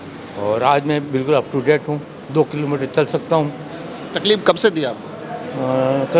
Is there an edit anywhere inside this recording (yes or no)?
no